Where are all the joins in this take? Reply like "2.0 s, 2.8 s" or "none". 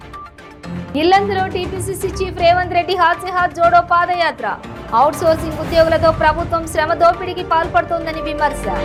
none